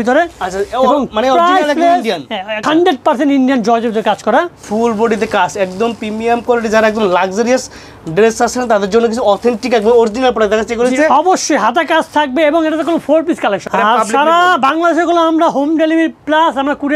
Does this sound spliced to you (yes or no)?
yes